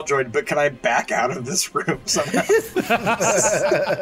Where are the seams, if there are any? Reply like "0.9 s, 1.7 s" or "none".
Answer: none